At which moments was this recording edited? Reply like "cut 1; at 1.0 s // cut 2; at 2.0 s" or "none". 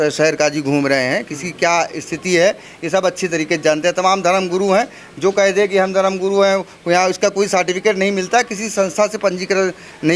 none